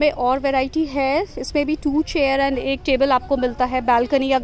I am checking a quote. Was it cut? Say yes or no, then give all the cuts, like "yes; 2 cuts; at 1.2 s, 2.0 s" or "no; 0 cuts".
no; 0 cuts